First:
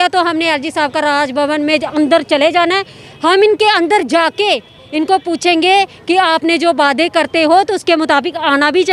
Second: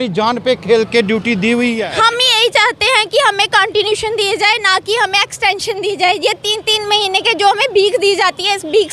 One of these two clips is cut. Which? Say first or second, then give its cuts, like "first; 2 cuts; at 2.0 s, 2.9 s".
second; 1 cut; at 1.8 s